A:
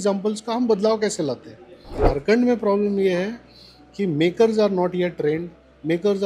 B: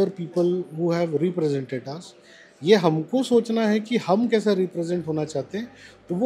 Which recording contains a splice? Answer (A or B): A